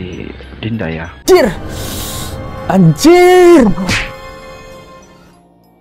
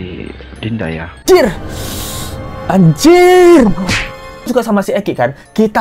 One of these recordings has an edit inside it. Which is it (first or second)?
second